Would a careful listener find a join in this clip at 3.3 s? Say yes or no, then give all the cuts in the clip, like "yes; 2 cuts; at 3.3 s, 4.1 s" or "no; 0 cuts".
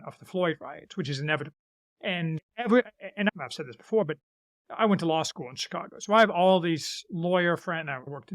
yes; 2 cuts; at 2.4 s, 3.3 s